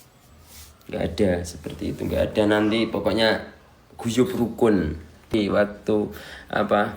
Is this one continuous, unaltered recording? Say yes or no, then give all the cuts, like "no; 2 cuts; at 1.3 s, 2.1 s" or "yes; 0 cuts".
no; 1 cut; at 5.3 s